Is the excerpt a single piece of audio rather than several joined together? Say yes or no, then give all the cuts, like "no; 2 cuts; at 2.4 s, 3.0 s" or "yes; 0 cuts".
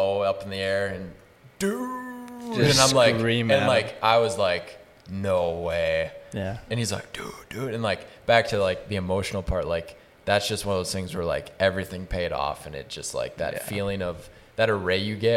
yes; 0 cuts